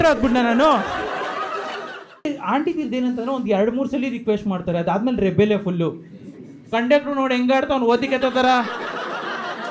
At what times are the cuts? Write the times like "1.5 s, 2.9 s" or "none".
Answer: 2.2 s